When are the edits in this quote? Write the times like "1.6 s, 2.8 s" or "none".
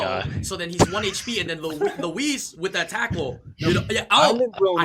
none